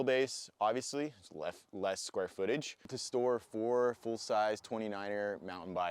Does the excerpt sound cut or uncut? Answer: cut